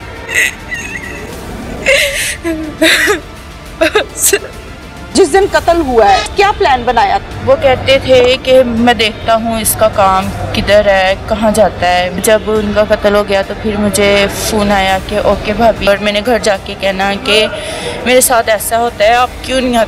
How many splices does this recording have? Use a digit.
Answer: 2